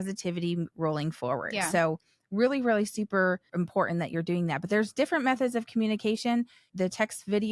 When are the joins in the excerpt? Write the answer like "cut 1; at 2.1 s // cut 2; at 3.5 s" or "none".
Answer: cut 1; at 3.5 s // cut 2; at 6.6 s